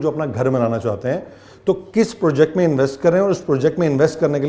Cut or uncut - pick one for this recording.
uncut